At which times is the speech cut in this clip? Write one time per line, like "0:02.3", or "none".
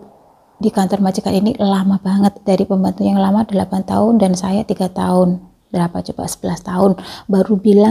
none